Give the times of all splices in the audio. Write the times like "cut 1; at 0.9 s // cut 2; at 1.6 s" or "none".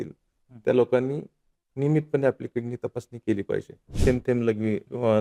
cut 1; at 3.9 s